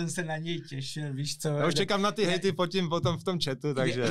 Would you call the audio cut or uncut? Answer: uncut